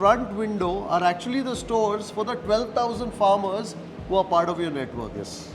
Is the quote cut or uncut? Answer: uncut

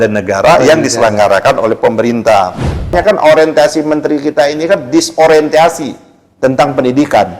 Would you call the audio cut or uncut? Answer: cut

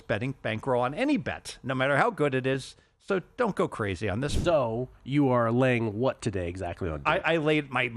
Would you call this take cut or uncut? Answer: cut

